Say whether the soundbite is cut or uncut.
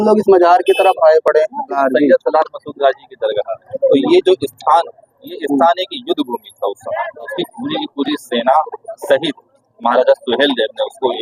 cut